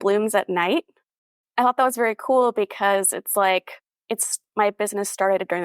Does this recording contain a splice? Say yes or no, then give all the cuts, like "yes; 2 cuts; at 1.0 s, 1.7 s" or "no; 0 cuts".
yes; 1 cut; at 1.1 s